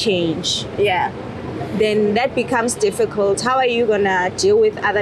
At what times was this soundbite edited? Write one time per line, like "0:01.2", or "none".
none

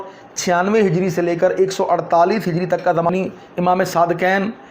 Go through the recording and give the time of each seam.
0:03.1

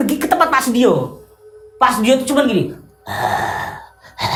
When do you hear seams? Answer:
none

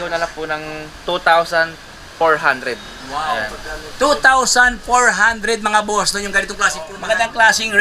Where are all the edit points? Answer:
0:06.9

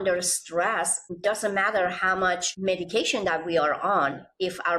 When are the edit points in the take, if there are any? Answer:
0:01.0
0:02.5

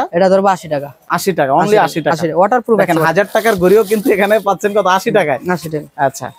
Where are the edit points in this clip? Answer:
none

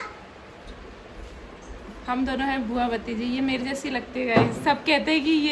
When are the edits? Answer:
none

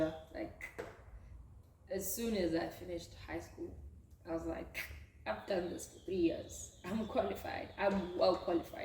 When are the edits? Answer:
none

